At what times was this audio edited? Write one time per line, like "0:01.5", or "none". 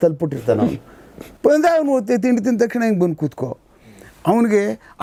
none